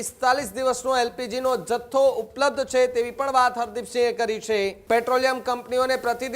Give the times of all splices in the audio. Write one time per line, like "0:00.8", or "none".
0:04.8